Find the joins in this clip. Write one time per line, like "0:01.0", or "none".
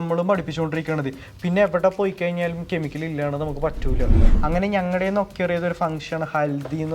0:04.2